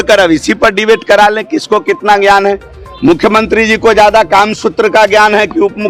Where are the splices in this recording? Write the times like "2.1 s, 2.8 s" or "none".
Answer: none